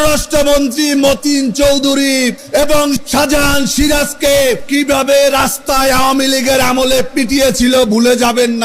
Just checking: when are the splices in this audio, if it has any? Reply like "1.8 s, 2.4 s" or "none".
2.7 s, 4.6 s